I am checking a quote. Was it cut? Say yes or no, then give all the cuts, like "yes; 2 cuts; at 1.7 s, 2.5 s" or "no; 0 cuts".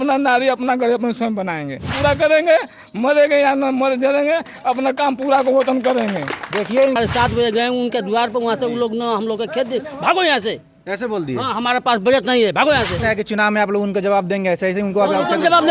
yes; 3 cuts; at 1.9 s, 7.0 s, 13.0 s